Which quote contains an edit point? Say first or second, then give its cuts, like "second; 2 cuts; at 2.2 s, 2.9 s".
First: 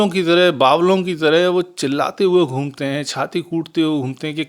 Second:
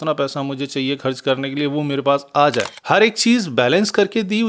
second; 1 cut; at 2.7 s